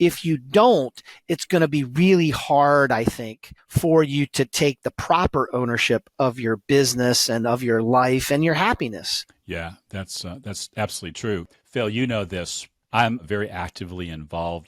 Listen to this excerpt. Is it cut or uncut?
uncut